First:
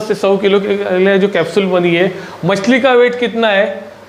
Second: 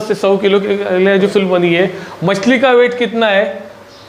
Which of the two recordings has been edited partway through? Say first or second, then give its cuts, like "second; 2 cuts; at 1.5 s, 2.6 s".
second; 1 cut; at 1.3 s